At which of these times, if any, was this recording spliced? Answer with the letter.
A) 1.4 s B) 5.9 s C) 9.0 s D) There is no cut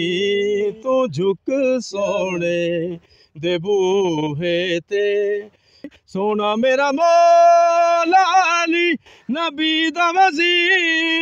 B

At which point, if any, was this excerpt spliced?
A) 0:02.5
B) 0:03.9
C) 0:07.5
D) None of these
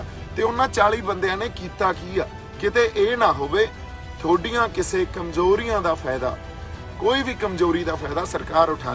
D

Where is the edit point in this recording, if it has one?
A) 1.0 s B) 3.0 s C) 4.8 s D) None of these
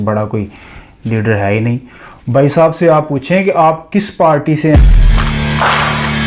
C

